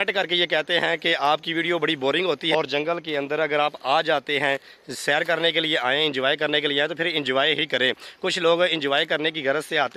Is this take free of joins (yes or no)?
no